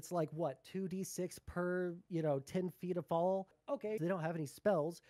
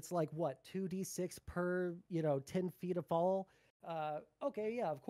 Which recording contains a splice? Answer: first; 1 cut; at 4.0 s

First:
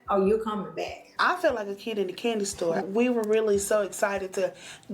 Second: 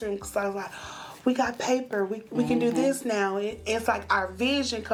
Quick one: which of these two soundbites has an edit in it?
first; 2 cuts; at 1.1 s, 2.9 s

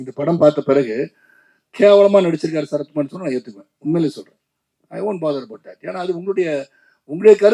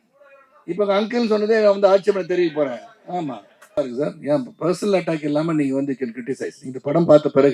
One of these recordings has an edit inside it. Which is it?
second; 1 cut; at 3.7 s

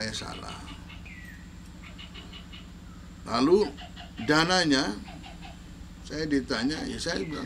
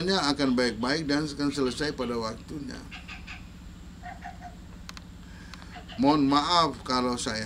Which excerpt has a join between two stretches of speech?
first; 1 cut; at 1.1 s

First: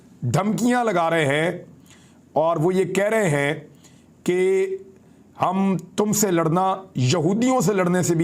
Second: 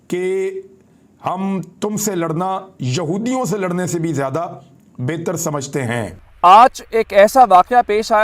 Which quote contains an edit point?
second; 1 cut; at 6.3 s

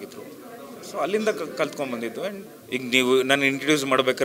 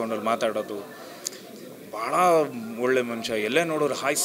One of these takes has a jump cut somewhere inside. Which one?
first; 1 cut; at 2.5 s

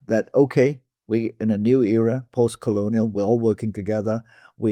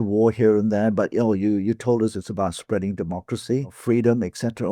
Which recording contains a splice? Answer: second; 1 cut; at 3.8 s

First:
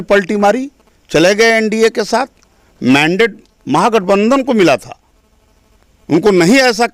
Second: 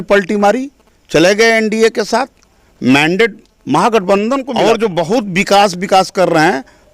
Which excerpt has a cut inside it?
second; 1 cut; at 4.5 s

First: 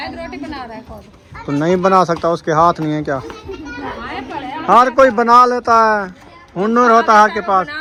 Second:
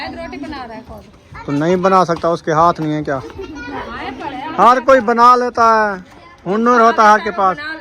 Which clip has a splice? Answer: second; 1 cut; at 3.3 s

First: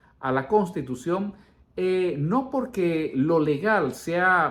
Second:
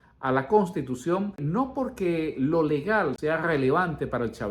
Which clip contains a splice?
second; 2 cuts; at 1.4 s, 3.2 s

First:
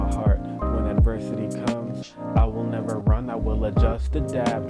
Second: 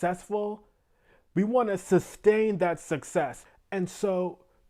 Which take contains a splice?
second; 1 cut; at 3.4 s

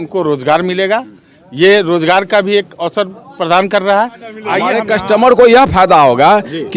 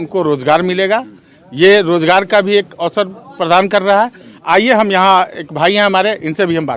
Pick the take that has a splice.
first; 1 cut; at 4.7 s

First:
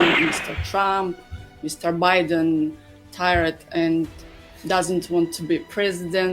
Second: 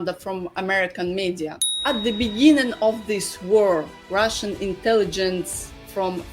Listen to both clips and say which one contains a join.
second; 1 cut; at 1.7 s

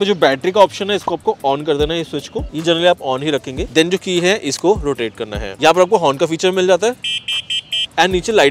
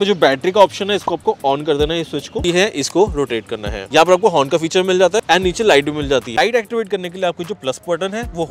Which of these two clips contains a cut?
second; 3 cuts; at 2.4 s, 5.2 s, 6.3 s

